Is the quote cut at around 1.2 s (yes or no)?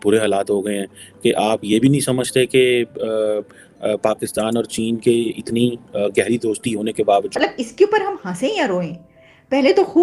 no